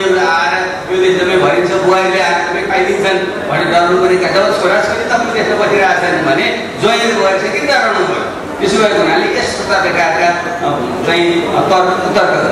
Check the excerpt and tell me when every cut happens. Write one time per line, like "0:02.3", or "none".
none